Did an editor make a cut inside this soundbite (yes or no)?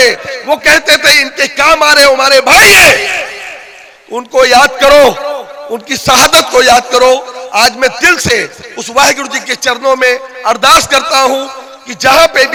no